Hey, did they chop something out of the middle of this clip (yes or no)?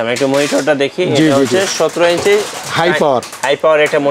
no